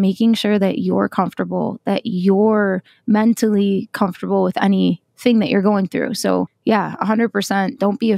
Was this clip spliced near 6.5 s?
yes; 1 cut; at 6.5 s

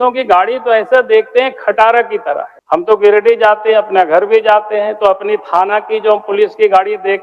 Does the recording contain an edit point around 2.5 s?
yes; 1 cut; at 2.5 s

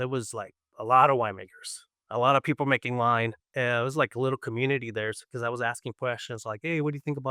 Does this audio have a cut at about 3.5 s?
yes; 1 cut; at 3.5 s

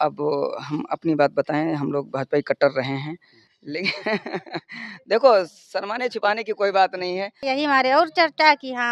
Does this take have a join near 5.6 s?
no; 1 cut; at 7.3 s

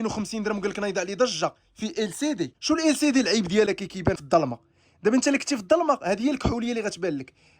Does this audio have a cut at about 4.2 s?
yes; 2 cuts; at 2.6 s, 4.2 s

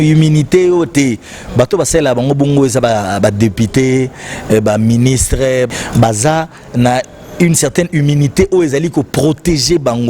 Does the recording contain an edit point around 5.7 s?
yes; 1 cut; at 5.7 s

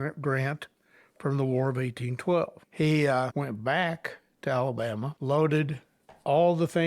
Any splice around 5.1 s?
yes; 3 cuts; at 2.6 s, 3.3 s, 5.1 s

